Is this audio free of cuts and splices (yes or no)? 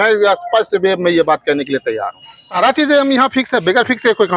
no